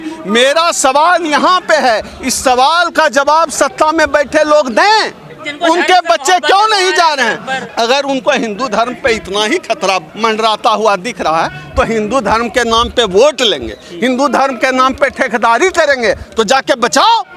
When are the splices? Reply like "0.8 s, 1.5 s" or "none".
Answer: none